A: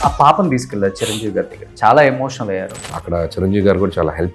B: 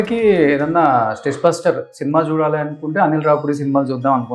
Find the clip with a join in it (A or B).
A